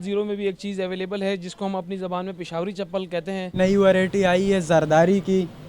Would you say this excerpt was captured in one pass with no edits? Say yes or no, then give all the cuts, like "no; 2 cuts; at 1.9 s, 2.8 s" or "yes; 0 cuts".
no; 1 cut; at 3.5 s